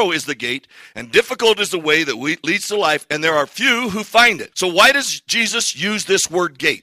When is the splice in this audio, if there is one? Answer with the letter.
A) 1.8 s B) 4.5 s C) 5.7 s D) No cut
B